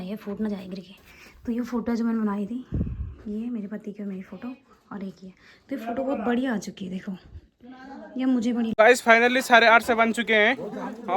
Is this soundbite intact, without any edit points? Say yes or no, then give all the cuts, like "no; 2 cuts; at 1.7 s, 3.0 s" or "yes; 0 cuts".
no; 1 cut; at 8.7 s